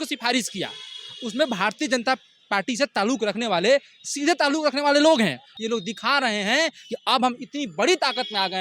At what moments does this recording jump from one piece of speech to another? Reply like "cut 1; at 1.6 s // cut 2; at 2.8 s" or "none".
cut 1; at 5.4 s